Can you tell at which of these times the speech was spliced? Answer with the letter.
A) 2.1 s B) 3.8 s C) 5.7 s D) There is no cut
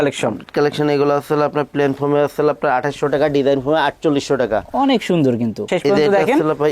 C